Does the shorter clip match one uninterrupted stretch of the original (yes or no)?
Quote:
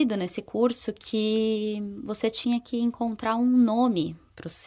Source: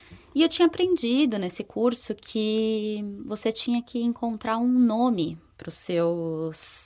yes